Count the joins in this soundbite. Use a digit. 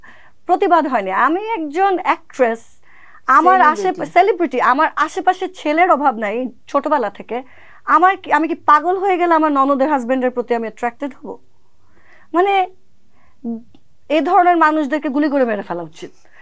0